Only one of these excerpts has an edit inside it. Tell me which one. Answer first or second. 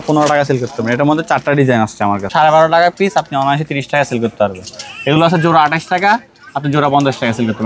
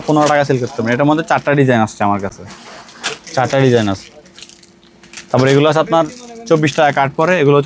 first